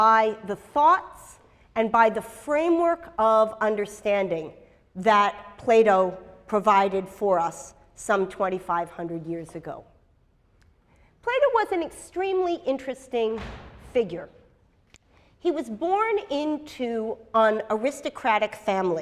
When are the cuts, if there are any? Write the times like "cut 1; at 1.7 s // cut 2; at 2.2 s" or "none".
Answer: cut 1; at 8.2 s